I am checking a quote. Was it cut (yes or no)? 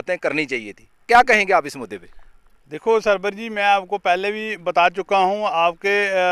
no